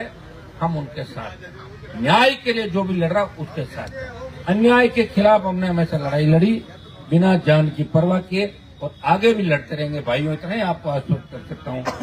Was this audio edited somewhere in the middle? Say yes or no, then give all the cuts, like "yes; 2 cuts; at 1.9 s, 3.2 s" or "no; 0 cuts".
no; 0 cuts